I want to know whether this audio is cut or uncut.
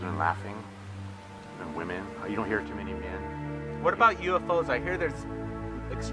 uncut